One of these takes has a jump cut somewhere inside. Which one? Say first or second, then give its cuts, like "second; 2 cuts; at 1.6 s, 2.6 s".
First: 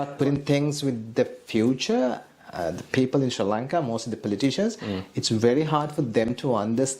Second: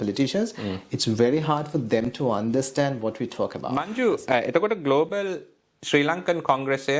second; 1 cut; at 3.7 s